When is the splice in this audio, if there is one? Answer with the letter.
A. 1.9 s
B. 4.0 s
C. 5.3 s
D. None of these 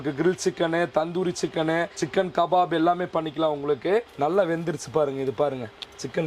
B